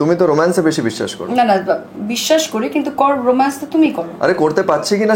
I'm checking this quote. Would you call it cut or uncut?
uncut